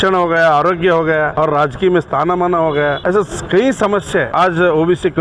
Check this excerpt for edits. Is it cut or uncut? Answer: cut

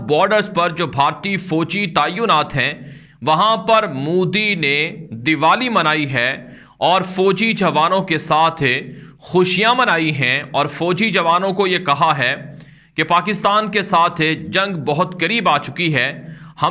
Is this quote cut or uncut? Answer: uncut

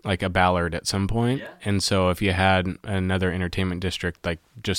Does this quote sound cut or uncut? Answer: uncut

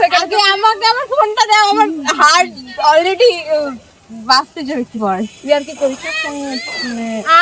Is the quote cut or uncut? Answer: uncut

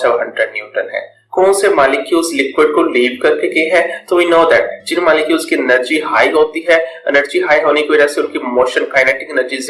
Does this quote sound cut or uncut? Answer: cut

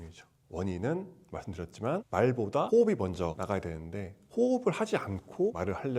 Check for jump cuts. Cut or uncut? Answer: uncut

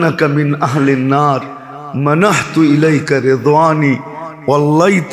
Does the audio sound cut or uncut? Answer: uncut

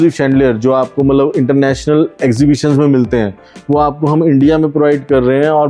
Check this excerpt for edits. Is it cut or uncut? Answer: uncut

